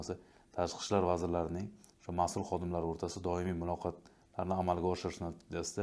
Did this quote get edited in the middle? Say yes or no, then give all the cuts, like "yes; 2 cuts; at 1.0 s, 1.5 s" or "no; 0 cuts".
no; 0 cuts